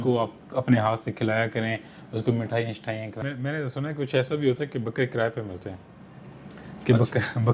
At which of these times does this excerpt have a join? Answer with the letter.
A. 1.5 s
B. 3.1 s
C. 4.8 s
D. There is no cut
B